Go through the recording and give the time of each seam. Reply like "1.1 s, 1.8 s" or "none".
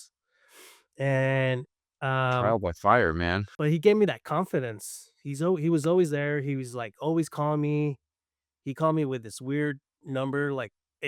3.5 s

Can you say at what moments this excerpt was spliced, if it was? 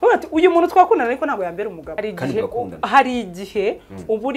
1.9 s

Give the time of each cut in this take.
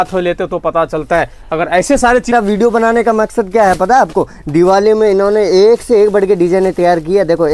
2.3 s

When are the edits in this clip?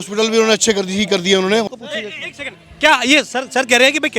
1.6 s

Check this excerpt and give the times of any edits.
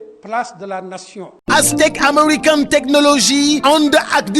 1.3 s

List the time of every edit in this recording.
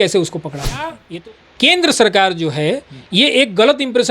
1.0 s

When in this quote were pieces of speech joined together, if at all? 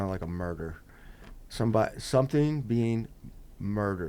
none

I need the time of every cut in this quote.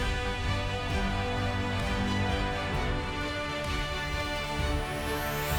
none

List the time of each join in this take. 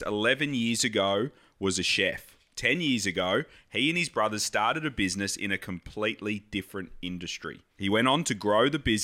7.6 s

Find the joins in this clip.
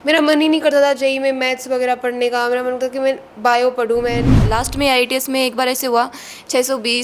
4.5 s

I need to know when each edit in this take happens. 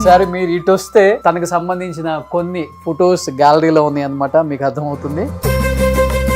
1.2 s

